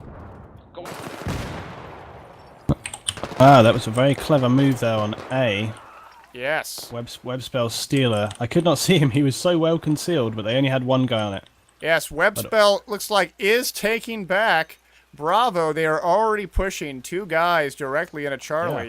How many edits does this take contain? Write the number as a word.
one